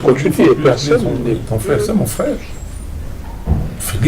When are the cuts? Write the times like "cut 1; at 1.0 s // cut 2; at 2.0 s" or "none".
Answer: cut 1; at 1.5 s